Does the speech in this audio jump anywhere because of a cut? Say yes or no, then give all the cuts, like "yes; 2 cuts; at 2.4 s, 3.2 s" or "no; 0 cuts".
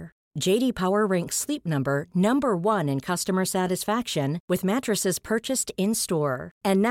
no; 0 cuts